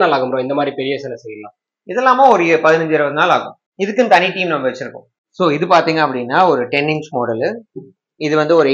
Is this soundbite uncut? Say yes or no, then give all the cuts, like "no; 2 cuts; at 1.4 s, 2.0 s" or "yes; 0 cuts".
yes; 0 cuts